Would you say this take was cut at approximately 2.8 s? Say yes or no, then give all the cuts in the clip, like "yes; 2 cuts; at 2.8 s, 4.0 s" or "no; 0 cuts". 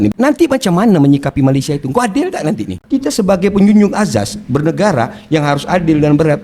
yes; 1 cut; at 2.8 s